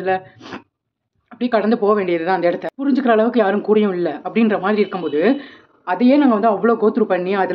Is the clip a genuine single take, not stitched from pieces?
no; 1 cut; at 2.7 s

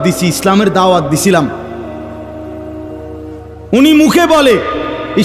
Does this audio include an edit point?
yes; 2 cuts; at 1.5 s, 3.1 s

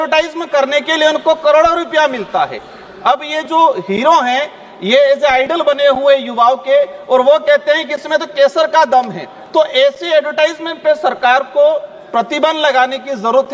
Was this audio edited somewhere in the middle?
no; 0 cuts

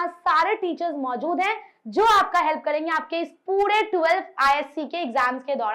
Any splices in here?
no; 0 cuts

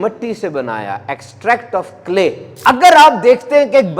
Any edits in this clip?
yes; 1 cut; at 2.5 s

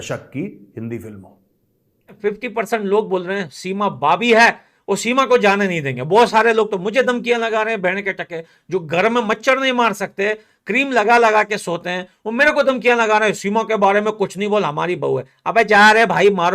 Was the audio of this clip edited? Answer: yes; 1 cut; at 2.1 s

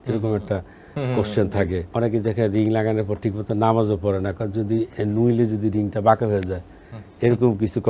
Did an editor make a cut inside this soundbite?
yes; 1 cut; at 1.9 s

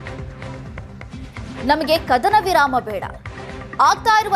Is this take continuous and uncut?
no; 1 cut; at 1.6 s

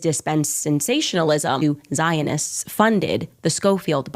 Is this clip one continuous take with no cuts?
no; 1 cut; at 1.6 s

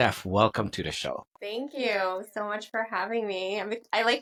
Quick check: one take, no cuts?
yes; 0 cuts

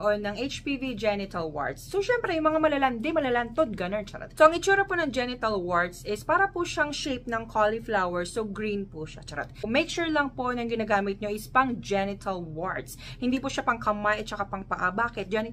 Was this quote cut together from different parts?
yes; 2 cuts; at 4.2 s, 9.7 s

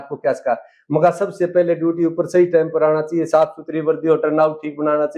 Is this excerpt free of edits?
yes; 0 cuts

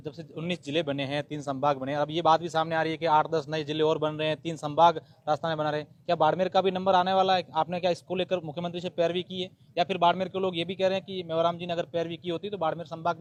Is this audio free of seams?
yes; 0 cuts

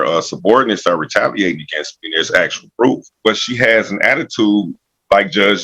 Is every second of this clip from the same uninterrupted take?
no; 1 cut; at 3.2 s

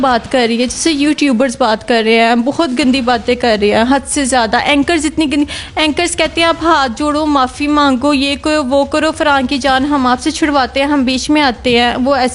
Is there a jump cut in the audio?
no; 0 cuts

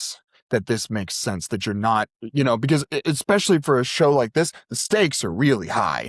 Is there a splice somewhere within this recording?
no; 0 cuts

